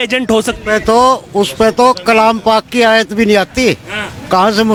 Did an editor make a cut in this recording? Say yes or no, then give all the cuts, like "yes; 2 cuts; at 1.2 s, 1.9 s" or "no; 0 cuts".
no; 0 cuts